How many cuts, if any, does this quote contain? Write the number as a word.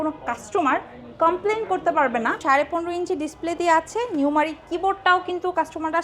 one